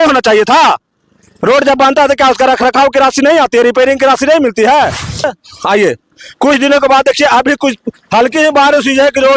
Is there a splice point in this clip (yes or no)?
yes